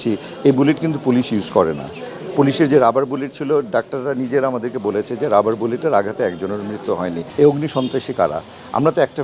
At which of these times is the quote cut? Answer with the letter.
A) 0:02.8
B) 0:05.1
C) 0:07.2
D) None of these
C